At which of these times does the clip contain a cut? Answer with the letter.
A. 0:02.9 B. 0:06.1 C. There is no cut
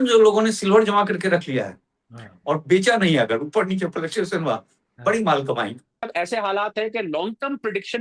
B